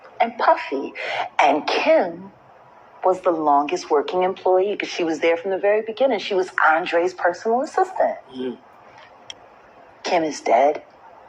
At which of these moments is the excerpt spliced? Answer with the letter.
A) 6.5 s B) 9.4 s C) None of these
B